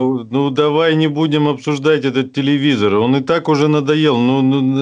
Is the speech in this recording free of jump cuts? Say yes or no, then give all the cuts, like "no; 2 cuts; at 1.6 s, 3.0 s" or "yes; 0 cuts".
yes; 0 cuts